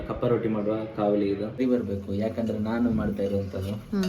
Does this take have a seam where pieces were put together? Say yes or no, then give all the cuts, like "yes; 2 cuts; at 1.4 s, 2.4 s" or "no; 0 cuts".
yes; 1 cut; at 1.5 s